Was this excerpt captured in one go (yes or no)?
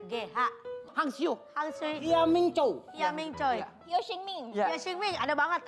no